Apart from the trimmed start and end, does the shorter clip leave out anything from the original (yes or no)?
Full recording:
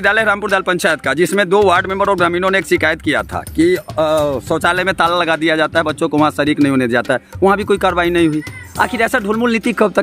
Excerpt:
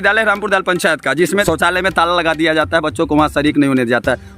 yes